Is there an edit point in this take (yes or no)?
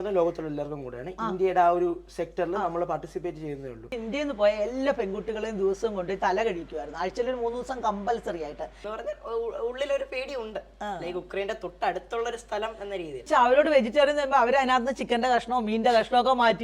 yes